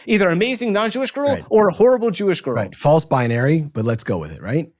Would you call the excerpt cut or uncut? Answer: uncut